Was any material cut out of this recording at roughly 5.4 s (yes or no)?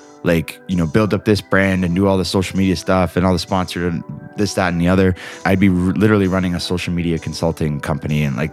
yes